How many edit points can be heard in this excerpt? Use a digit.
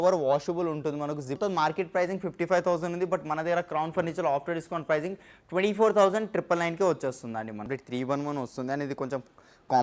2